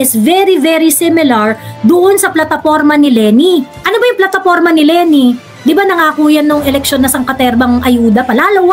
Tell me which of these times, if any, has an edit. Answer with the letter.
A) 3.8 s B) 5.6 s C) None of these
C